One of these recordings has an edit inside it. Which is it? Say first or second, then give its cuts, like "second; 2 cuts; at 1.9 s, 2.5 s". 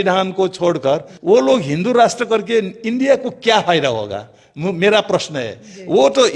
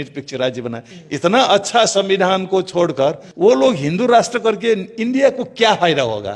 second; 1 cut; at 0.9 s